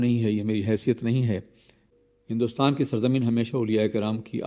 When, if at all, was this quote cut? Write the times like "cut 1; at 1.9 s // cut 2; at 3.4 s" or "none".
cut 1; at 1.8 s